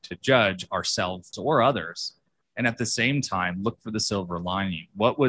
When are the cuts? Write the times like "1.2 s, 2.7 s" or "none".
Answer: 1.3 s